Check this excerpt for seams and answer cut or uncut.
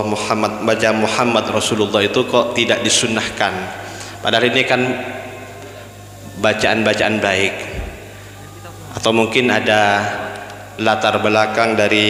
uncut